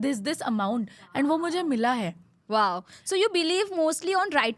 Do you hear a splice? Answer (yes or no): no